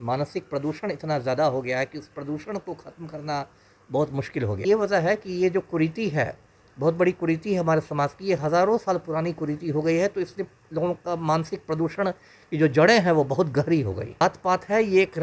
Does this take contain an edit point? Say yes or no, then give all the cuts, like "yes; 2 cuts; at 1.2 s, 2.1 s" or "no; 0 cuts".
yes; 2 cuts; at 4.6 s, 14.2 s